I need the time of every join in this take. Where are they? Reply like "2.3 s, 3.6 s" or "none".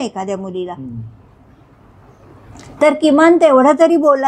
none